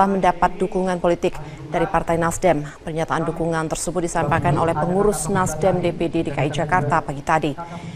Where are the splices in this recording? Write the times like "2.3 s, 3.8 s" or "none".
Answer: 5.9 s